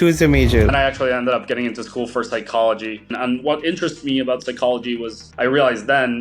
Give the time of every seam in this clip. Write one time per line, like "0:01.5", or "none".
0:00.7
0:03.1